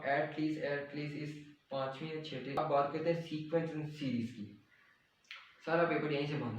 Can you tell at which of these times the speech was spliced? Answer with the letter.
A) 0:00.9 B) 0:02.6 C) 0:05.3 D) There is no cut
B